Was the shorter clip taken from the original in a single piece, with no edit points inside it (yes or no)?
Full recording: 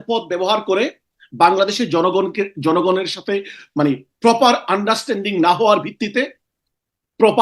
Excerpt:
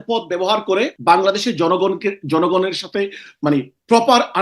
no